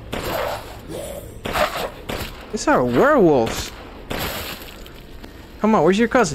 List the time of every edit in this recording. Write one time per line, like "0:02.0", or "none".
0:05.2